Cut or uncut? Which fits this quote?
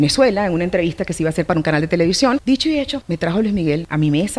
cut